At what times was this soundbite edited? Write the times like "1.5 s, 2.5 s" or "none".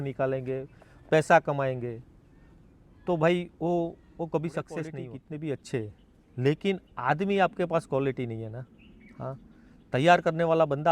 5.0 s